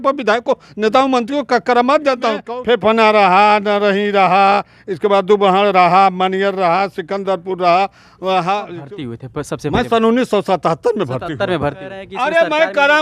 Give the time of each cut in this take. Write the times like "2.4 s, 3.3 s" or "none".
2.5 s, 8.7 s, 12.0 s